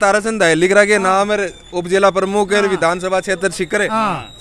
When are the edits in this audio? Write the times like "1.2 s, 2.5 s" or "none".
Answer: none